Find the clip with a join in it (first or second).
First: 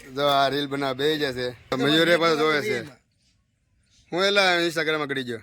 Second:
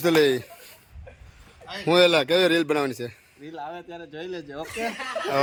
first